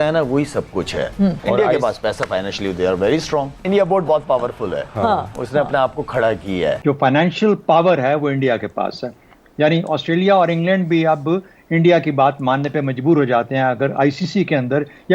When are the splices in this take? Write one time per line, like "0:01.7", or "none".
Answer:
0:01.4
0:03.6
0:06.8